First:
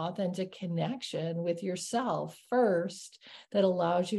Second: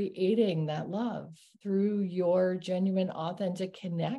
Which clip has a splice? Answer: second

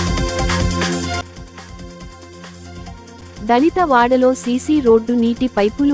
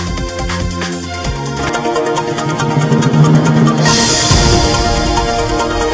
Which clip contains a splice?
first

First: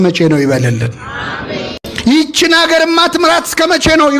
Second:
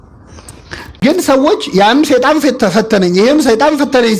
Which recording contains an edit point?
second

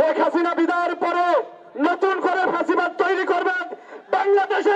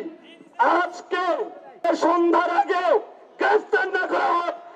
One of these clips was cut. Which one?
second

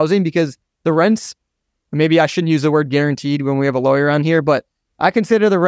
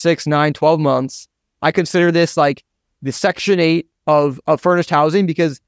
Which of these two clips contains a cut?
second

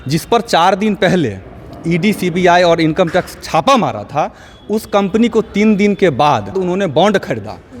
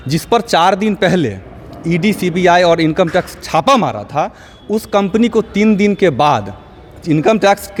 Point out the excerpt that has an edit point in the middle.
first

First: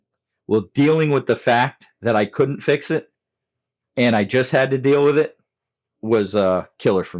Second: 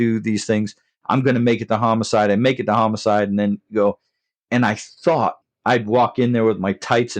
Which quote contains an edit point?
second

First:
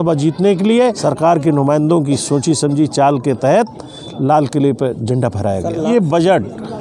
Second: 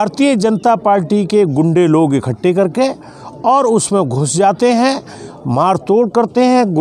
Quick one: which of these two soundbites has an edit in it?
first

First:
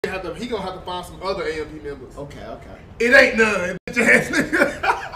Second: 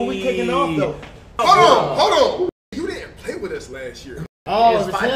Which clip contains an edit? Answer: second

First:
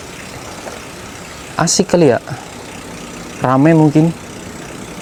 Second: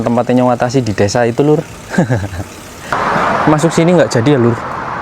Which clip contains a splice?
second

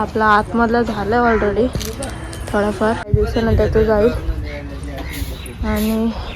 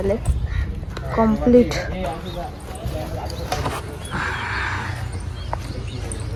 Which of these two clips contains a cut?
first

